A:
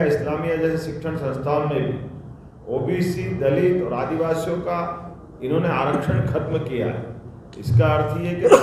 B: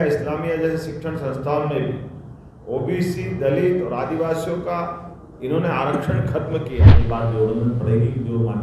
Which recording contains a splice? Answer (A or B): B